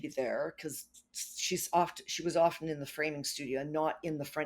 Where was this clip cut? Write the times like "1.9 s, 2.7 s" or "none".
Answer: none